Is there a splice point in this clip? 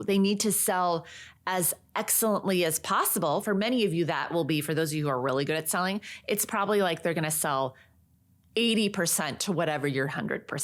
no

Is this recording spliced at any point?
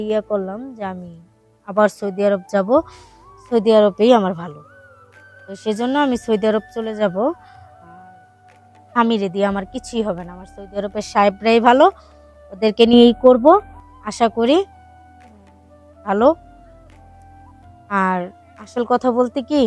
yes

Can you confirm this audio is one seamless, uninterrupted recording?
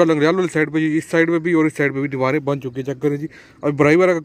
yes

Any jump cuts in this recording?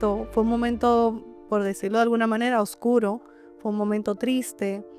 no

